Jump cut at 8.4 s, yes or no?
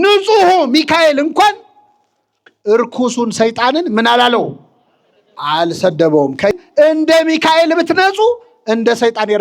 no